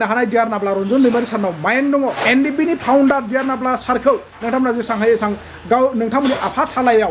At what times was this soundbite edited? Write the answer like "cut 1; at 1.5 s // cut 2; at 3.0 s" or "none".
cut 1; at 2.2 s